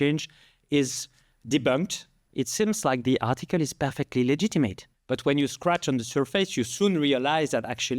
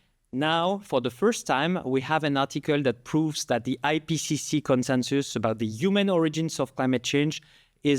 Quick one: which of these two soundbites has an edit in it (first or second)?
first